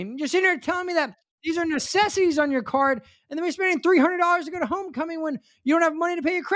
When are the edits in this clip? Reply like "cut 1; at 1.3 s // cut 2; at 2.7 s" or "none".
none